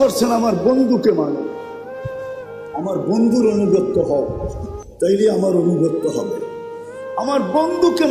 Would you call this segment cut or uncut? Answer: cut